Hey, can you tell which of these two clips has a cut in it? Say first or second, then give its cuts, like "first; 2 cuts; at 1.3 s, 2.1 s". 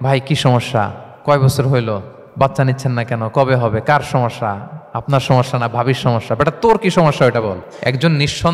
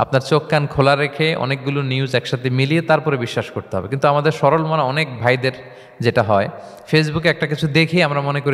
first; 3 cuts; at 1.0 s, 2.2 s, 7.7 s